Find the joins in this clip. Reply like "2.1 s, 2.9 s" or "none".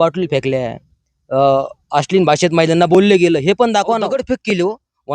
4.2 s